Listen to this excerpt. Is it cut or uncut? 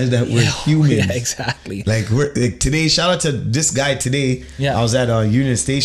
uncut